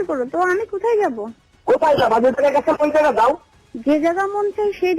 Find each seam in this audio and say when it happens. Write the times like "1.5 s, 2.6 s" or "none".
none